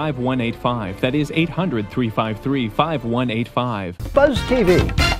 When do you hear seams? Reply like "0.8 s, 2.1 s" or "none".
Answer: 3.9 s

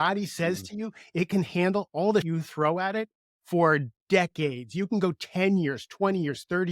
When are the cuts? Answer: 2.3 s

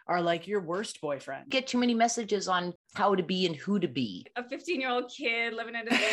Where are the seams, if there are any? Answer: 1.5 s, 2.8 s, 4.3 s

